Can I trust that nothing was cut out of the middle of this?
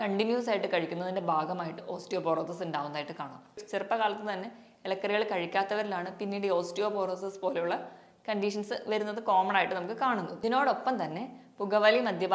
no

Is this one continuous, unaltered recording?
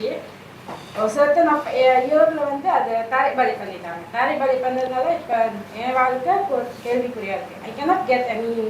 yes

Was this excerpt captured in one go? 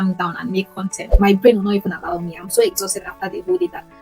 no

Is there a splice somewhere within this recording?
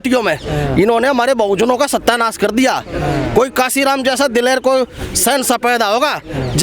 no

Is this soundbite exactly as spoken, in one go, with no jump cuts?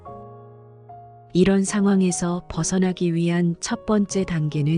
no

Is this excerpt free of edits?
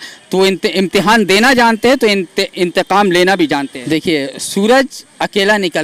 no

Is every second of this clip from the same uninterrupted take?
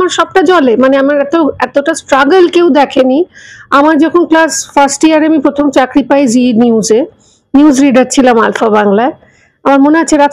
yes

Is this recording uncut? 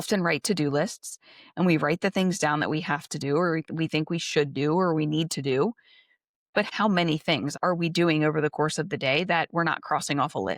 no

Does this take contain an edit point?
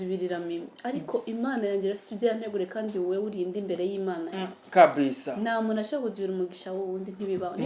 no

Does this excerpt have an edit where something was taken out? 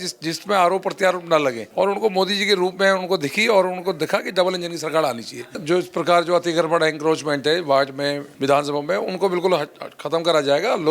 yes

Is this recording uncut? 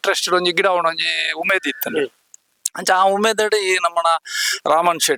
yes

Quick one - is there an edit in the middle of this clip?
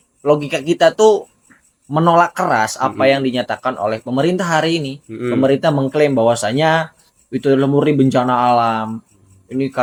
no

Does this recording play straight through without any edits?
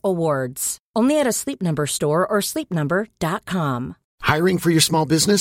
no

